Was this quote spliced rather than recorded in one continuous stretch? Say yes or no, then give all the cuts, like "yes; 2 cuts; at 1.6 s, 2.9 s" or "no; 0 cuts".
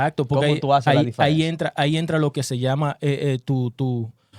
no; 0 cuts